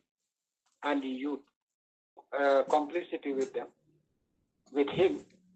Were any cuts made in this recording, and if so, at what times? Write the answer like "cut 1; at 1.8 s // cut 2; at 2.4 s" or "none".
cut 1; at 2.2 s